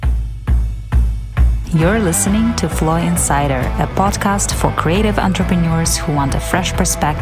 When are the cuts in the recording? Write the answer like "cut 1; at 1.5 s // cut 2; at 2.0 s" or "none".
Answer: none